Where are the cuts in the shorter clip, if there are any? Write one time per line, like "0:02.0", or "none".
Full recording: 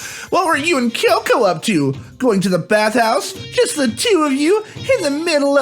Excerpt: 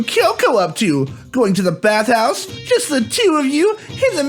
none